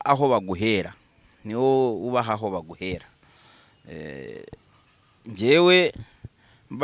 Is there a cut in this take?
no; 0 cuts

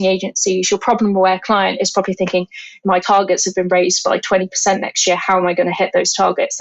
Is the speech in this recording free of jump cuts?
no; 1 cut; at 2.9 s

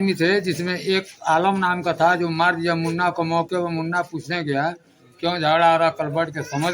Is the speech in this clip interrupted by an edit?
no; 0 cuts

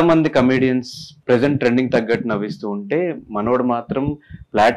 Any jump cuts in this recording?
yes; 1 cut; at 1.1 s

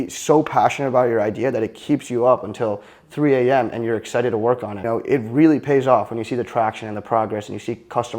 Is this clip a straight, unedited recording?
no; 1 cut; at 4.8 s

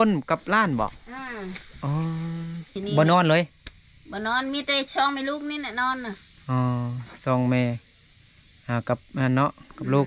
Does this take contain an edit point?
yes; 1 cut; at 2.7 s

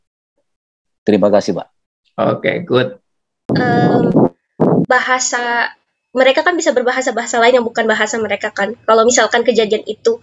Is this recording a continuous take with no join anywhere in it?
no; 1 cut; at 3.5 s

